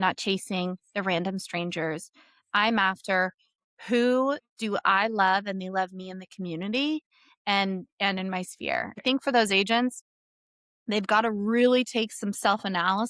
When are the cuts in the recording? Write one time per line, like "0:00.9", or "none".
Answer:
0:09.0